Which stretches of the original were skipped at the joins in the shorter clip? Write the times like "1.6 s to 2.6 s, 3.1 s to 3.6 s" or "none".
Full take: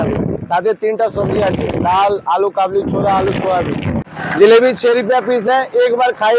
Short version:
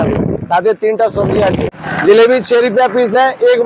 1.7 s to 4.0 s